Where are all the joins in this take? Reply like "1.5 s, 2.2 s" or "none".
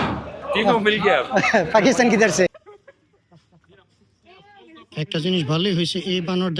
2.6 s